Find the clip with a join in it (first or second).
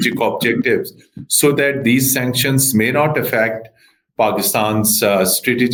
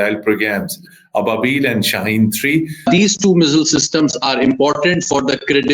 second